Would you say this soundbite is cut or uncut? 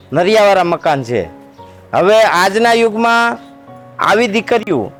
uncut